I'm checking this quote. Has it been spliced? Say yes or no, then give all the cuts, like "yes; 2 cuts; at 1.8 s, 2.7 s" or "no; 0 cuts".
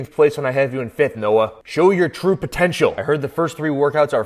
no; 0 cuts